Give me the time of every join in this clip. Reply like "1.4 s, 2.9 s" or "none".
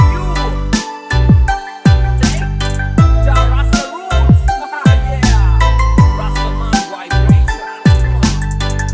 7.8 s